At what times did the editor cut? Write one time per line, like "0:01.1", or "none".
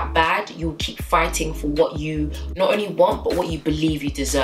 none